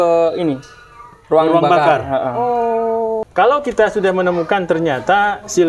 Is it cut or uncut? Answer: cut